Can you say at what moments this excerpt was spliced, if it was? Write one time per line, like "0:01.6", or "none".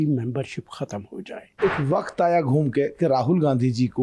0:01.6